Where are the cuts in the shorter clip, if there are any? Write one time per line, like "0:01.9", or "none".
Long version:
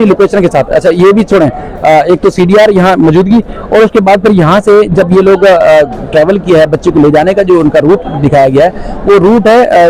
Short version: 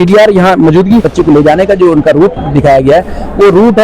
0:01.1

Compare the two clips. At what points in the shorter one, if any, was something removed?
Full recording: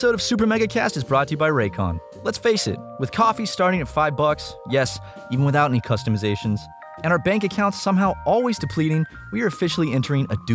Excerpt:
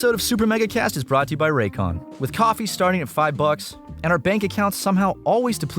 0:02.1
0:03.7

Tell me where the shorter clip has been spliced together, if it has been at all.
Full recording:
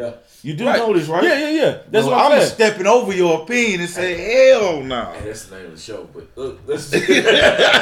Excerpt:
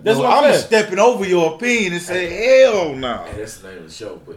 none

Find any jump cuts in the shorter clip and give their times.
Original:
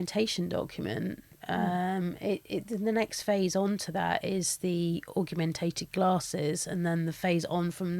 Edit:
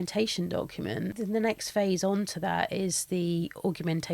0:01.2

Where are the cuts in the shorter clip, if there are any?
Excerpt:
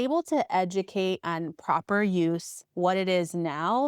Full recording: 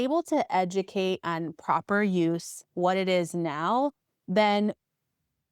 none

